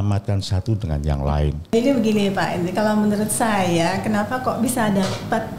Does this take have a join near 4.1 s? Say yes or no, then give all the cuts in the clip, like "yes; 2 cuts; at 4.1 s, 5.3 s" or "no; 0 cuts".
no; 1 cut; at 1.7 s